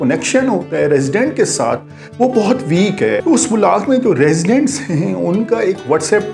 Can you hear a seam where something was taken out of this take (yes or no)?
yes